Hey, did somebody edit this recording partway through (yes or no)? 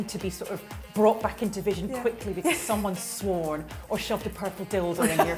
no